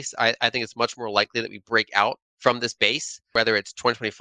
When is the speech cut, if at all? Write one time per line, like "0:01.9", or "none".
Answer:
0:02.3
0:03.2